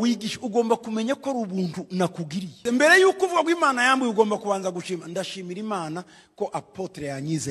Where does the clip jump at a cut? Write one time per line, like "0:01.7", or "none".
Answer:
0:02.6